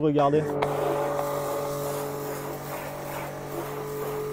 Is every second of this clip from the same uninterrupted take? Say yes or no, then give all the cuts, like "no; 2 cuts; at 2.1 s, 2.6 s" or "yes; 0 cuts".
yes; 0 cuts